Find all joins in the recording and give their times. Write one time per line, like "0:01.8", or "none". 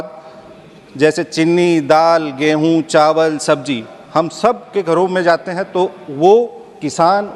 none